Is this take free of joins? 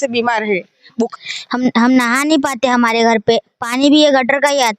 no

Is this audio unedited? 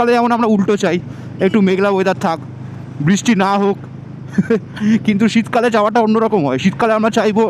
yes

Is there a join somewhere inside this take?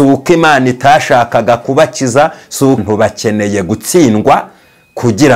yes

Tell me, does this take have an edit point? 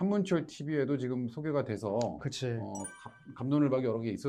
no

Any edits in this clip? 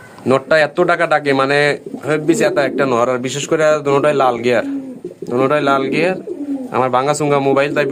no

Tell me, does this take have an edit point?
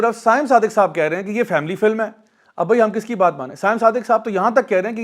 no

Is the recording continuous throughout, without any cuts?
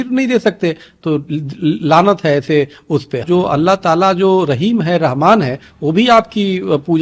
no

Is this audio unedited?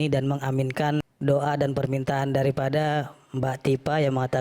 no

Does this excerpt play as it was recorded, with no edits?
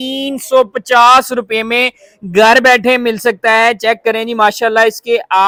yes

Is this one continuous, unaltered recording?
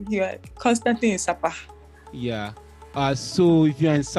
yes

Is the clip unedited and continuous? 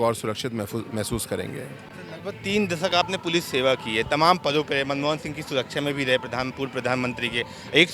yes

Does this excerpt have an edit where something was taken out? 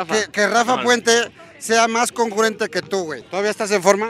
yes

